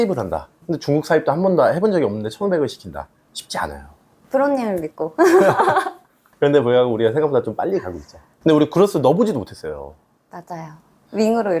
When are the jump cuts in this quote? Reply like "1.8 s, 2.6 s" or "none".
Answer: none